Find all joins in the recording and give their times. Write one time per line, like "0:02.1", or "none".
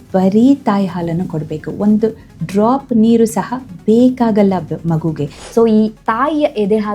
0:05.3